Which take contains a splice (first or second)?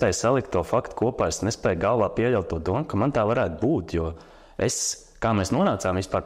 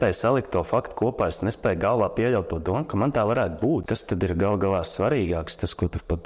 second